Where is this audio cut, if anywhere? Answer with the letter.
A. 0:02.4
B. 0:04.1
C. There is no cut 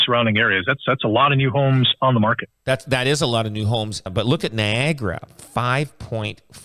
B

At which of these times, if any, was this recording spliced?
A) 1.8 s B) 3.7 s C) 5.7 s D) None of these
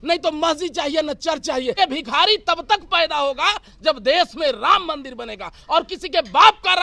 A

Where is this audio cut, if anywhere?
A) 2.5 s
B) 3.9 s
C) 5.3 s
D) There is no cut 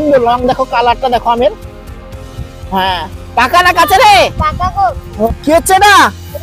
C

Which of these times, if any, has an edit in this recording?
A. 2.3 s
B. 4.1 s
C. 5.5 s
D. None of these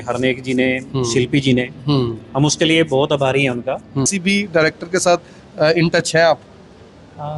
B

